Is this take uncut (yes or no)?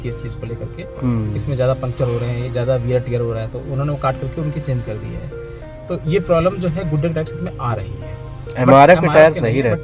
yes